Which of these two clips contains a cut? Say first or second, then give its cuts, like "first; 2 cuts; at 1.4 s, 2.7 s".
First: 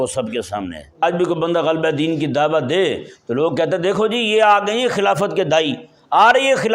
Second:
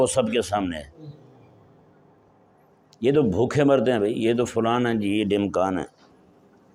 first; 1 cut; at 1.0 s